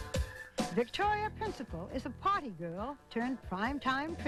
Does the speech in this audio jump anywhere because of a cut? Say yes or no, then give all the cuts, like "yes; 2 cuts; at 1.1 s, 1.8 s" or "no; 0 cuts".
no; 0 cuts